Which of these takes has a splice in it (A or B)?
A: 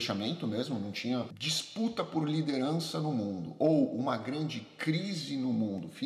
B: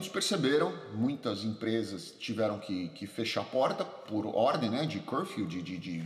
A